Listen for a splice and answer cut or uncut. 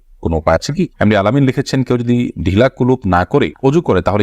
cut